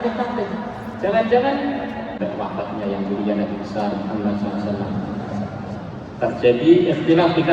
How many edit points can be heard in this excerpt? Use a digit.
1